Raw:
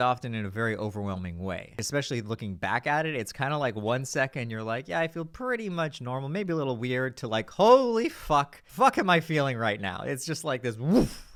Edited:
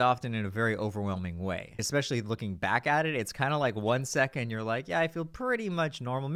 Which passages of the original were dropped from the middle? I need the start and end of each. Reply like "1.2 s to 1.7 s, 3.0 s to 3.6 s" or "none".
none